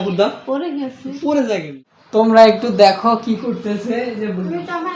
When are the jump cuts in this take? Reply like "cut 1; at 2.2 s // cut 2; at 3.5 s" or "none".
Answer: cut 1; at 1.7 s

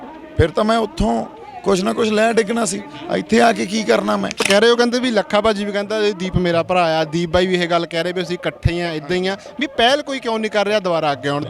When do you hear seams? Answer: cut 1; at 4.5 s

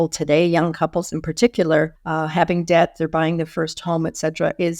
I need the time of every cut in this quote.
cut 1; at 2.0 s

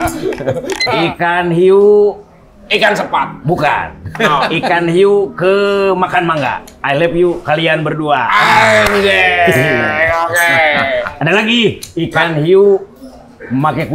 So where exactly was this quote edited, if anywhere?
cut 1; at 1.0 s // cut 2; at 6.7 s

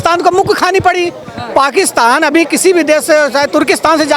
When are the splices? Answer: none

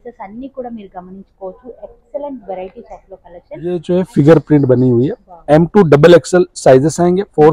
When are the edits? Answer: cut 1; at 3.8 s

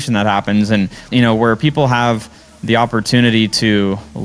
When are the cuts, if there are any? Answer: cut 1; at 1.1 s

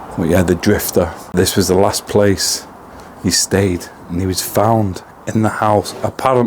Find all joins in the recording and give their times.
none

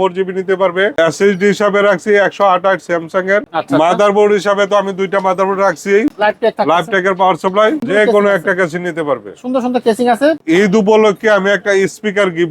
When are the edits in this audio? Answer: cut 1; at 0.9 s // cut 2; at 3.5 s // cut 3; at 6.1 s // cut 4; at 7.9 s // cut 5; at 10.4 s

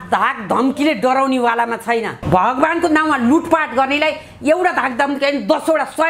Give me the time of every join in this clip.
cut 1; at 2.2 s

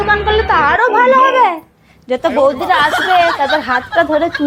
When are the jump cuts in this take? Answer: none

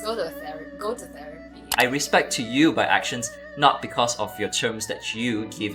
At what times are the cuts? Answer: cut 1; at 1.6 s

